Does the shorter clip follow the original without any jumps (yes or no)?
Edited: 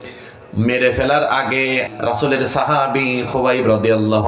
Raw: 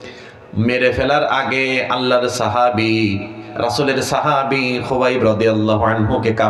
no